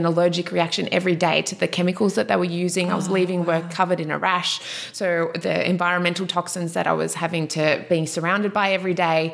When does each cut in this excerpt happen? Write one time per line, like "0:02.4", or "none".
0:07.8